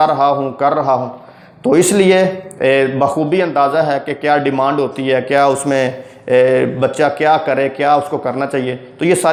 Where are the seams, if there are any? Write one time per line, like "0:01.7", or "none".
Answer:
none